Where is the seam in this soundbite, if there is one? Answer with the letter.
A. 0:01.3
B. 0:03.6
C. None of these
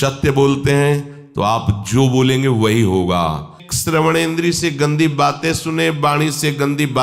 B